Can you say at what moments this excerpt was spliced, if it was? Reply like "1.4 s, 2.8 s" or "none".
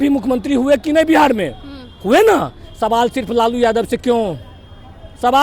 none